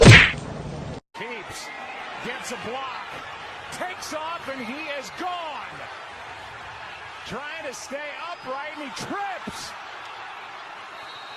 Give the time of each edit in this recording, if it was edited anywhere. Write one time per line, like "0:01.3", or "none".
0:03.2

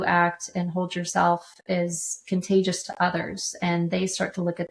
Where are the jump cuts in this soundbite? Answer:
none

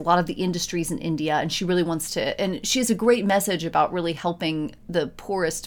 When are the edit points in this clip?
none

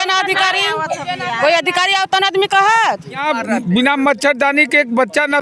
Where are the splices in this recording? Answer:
0:03.2

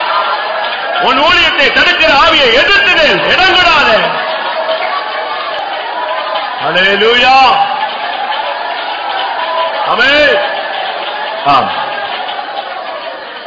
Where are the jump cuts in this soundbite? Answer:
0:05.6

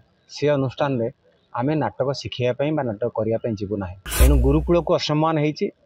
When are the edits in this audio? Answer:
0:04.0

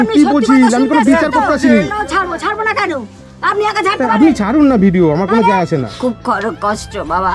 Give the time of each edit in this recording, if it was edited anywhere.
0:01.9
0:05.8

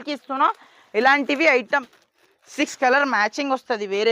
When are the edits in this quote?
0:01.9

